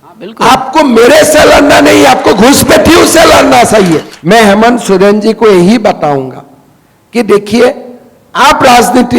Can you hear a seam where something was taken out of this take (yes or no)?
yes